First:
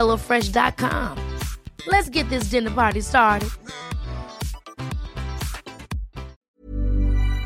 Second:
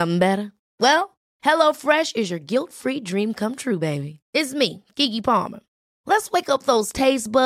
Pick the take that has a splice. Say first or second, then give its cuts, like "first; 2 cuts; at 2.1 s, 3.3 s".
first; 1 cut; at 6.5 s